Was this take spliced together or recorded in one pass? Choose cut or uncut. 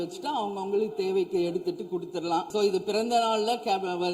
cut